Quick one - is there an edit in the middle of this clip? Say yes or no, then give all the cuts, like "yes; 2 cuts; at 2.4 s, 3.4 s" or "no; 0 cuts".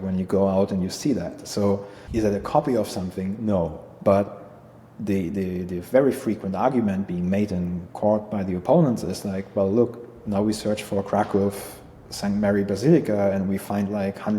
yes; 1 cut; at 2.0 s